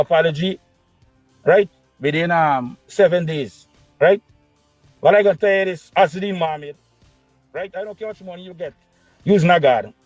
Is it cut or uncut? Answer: uncut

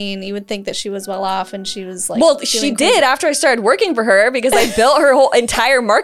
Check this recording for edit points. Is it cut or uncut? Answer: uncut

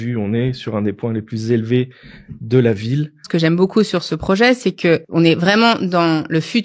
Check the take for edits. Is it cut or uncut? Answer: cut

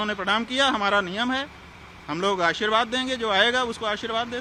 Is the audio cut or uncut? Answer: uncut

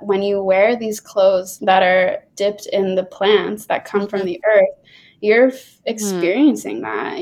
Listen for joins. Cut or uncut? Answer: uncut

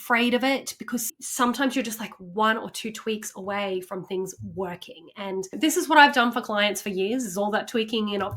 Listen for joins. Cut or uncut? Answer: cut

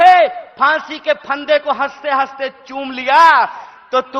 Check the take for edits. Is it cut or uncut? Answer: uncut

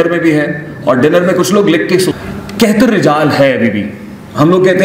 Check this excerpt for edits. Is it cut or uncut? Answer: cut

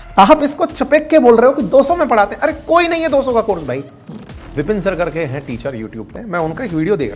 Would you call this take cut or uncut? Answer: cut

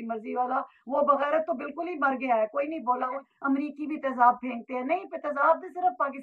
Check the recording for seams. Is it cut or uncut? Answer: cut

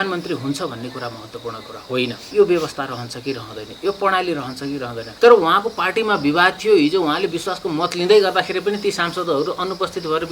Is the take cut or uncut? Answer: cut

